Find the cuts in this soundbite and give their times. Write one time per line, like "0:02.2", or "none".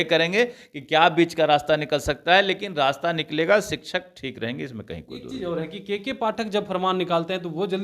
none